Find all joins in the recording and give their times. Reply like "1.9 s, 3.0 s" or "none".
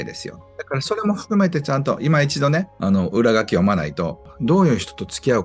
0.9 s, 2.7 s, 4.3 s